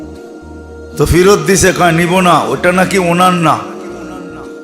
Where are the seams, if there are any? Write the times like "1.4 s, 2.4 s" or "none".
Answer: 1.0 s